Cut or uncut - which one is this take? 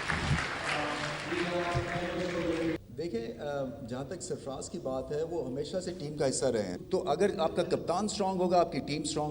cut